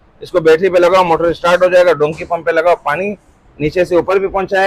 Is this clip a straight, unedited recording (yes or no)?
yes